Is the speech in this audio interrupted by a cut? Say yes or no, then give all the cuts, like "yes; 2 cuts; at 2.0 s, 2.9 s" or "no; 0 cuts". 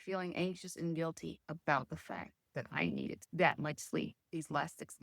yes; 1 cut; at 3.2 s